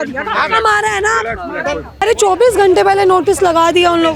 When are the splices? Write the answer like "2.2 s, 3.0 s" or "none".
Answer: 2.0 s